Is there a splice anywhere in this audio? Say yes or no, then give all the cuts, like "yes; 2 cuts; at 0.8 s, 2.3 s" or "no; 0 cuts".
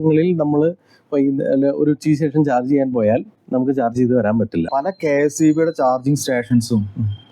yes; 2 cuts; at 3.4 s, 4.7 s